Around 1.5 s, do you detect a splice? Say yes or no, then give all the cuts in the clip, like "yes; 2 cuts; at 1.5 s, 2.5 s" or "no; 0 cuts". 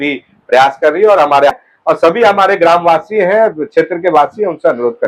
yes; 1 cut; at 1.5 s